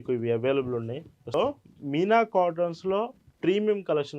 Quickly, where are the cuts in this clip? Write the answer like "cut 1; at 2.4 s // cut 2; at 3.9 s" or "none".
cut 1; at 1.3 s